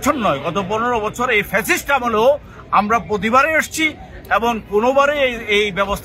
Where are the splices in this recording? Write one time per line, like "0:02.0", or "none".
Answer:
none